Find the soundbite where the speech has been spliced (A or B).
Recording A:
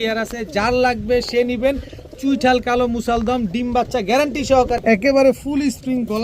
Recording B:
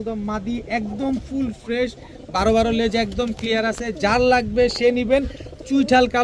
A